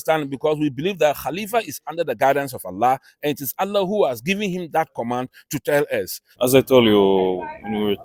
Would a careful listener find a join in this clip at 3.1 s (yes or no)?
no